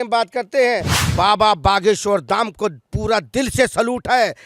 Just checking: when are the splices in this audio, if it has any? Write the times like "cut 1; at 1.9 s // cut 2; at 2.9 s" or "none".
cut 1; at 1.0 s